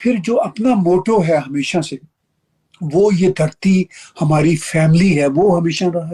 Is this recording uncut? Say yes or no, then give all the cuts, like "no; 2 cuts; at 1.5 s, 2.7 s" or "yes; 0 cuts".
yes; 0 cuts